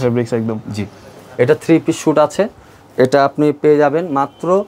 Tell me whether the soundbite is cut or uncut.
uncut